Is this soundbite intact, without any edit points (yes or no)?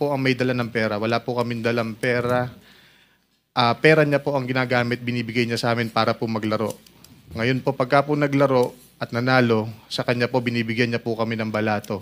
yes